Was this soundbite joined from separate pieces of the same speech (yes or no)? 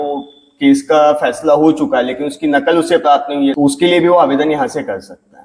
yes